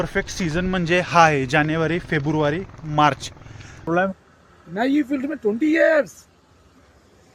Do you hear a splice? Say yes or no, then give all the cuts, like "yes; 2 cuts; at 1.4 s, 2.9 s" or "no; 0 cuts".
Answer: yes; 1 cut; at 3.9 s